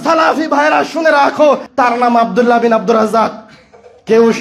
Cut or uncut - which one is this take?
cut